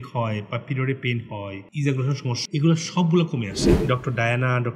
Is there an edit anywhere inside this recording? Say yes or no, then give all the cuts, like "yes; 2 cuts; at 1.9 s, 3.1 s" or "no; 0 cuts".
yes; 2 cuts; at 2.3 s, 3.6 s